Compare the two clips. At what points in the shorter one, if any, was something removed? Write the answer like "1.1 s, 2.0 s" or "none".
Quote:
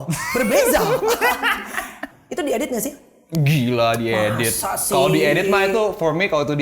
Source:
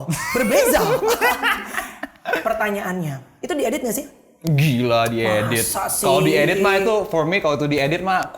2.1 s

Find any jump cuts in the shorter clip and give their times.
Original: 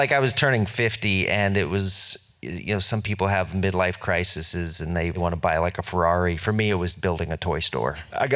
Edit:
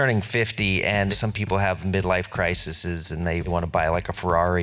1.1 s

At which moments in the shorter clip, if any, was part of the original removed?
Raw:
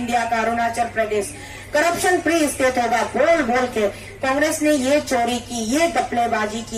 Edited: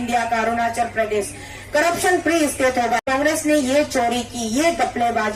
3.0 s

